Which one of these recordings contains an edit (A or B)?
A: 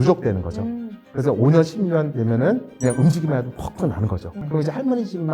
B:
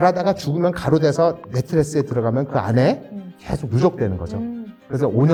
A